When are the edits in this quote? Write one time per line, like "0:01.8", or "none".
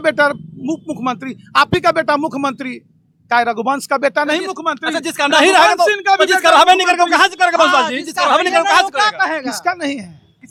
none